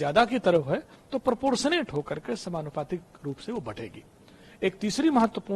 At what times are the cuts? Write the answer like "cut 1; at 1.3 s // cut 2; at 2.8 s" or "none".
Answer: none